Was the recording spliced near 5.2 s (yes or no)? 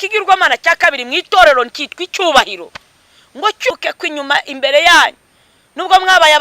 no